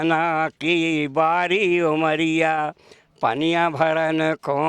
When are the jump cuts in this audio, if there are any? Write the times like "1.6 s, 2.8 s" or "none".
none